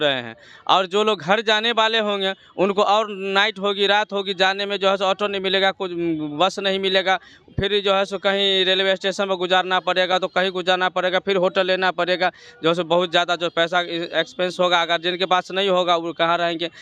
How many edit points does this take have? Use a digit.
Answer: 0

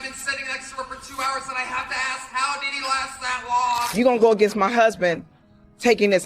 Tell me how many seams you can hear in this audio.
2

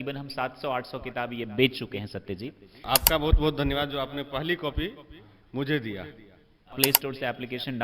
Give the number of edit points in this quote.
2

